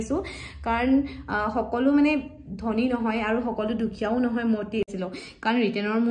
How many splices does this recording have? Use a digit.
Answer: 1